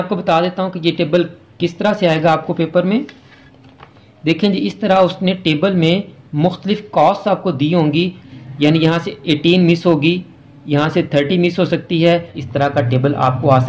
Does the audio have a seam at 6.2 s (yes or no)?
no